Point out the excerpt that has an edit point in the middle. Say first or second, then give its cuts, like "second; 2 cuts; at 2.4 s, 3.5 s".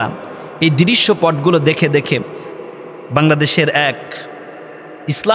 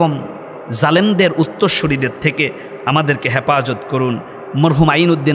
second; 1 cut; at 4.4 s